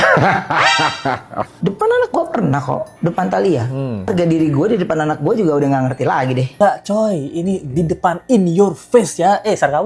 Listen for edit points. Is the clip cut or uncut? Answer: cut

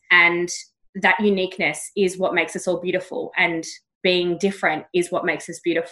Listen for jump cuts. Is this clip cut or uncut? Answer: uncut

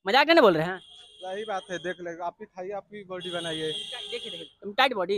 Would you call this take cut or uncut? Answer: uncut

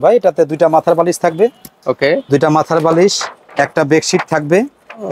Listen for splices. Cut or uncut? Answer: uncut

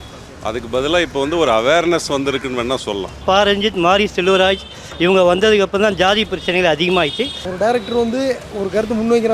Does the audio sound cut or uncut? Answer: cut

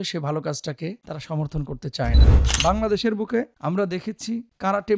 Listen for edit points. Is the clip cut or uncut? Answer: cut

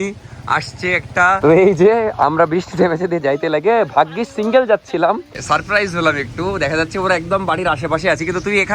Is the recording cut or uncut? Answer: cut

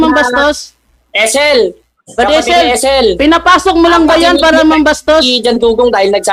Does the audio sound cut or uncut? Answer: uncut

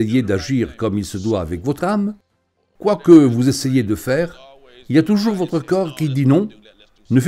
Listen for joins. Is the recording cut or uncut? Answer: uncut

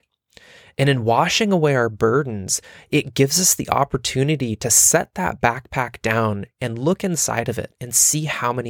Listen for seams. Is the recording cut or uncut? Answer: uncut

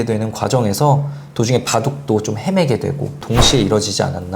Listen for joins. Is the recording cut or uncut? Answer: cut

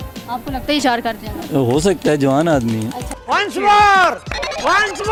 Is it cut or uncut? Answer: uncut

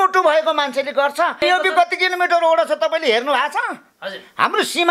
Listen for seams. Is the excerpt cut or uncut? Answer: cut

